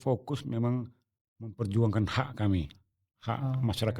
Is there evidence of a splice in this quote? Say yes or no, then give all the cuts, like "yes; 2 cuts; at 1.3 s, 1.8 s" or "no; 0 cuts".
no; 0 cuts